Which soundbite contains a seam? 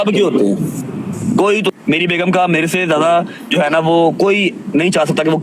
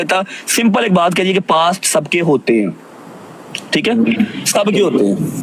first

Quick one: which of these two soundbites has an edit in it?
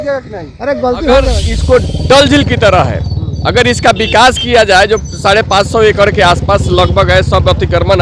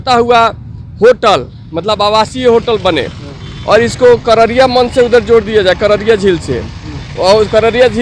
first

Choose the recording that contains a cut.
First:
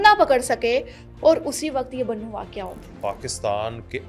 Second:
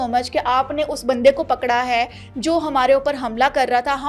first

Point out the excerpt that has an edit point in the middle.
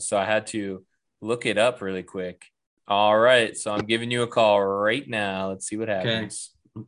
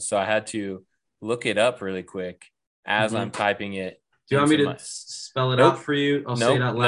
first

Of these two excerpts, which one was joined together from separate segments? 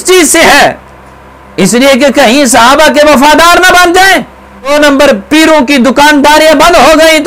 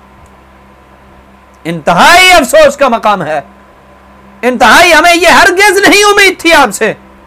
first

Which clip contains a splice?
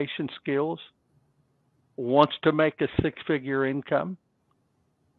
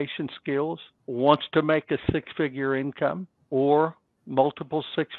second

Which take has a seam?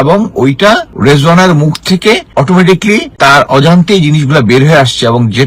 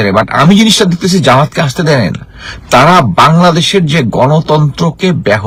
first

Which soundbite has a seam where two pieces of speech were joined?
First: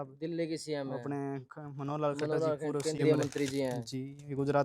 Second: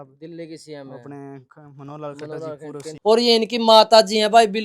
second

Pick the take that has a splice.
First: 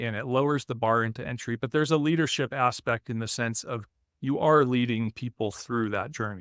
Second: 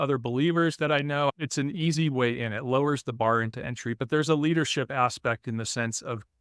second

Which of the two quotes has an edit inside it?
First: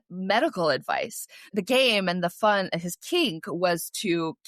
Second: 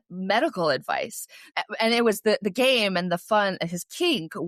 first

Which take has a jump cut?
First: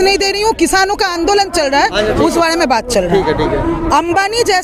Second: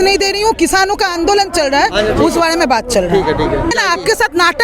second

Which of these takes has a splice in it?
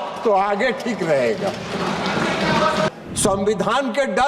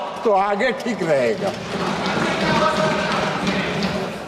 first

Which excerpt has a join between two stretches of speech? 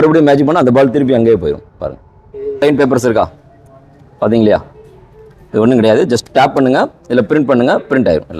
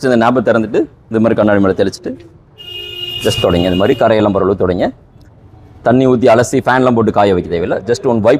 first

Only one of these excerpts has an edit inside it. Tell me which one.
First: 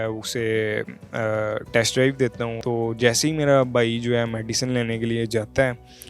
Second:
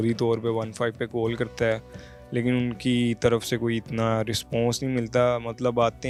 first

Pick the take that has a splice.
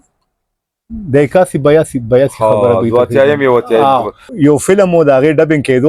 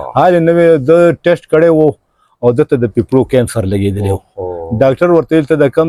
first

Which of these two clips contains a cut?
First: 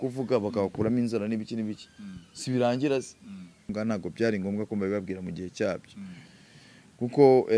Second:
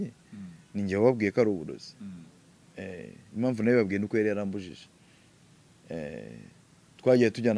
first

